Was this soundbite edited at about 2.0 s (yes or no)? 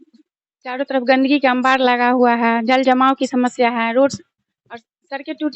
no